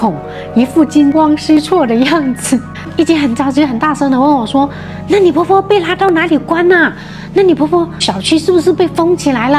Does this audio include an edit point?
yes; 1 cut; at 2.7 s

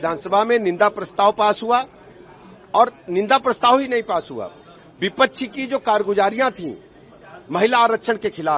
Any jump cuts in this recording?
no; 0 cuts

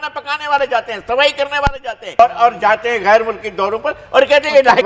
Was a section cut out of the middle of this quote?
yes; 1 cut; at 2.2 s

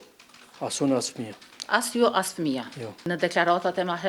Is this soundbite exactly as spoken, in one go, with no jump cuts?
yes; 0 cuts

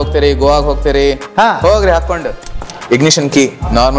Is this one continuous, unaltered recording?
no; 1 cut; at 2.7 s

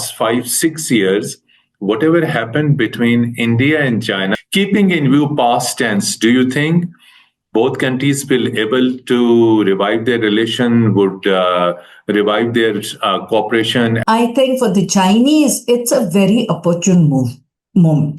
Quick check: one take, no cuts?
no; 2 cuts; at 4.3 s, 14.0 s

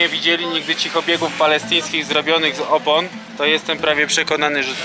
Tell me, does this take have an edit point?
no; 0 cuts

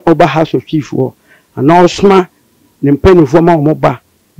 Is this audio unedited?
yes; 0 cuts

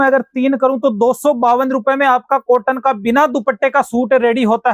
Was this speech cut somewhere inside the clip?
no; 0 cuts

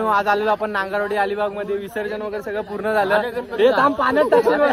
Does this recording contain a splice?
no; 0 cuts

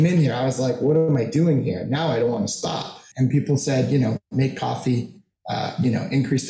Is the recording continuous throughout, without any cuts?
no; 1 cut; at 3.0 s

